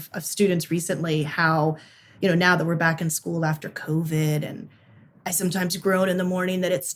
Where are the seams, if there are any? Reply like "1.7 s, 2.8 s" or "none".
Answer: none